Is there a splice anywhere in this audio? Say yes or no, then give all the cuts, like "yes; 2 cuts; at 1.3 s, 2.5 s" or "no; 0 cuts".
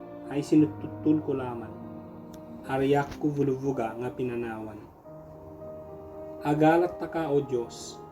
no; 0 cuts